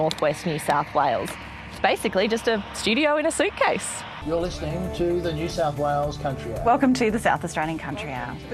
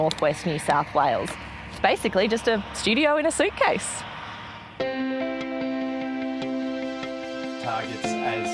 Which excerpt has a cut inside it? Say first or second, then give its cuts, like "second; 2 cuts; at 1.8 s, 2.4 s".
first; 1 cut; at 4.1 s